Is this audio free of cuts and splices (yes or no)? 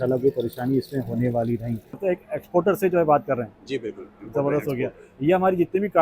no